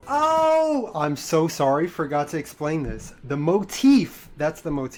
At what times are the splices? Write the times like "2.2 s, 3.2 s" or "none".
none